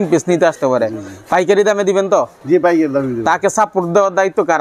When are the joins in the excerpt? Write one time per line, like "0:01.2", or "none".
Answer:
none